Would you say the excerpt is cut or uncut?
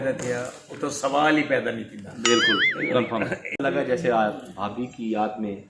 cut